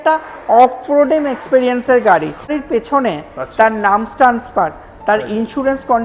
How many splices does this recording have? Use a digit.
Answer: 1